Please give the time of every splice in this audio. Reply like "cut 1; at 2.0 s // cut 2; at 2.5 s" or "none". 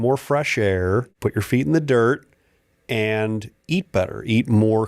cut 1; at 0.9 s